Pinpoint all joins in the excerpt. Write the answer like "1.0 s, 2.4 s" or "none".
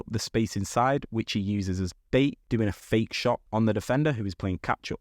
2.4 s